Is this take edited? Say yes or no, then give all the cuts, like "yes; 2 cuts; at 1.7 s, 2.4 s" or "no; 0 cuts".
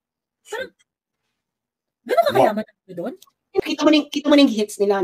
yes; 1 cut; at 3.6 s